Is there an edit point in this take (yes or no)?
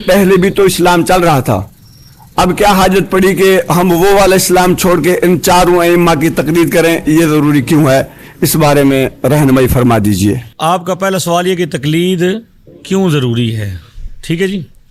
no